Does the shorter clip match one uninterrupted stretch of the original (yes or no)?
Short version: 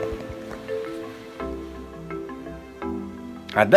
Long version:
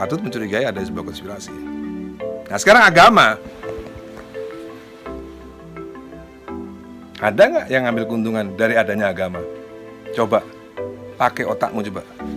yes